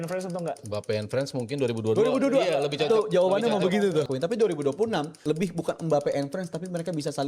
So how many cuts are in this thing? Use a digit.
2